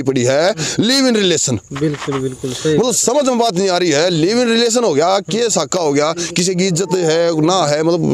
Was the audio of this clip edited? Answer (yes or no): no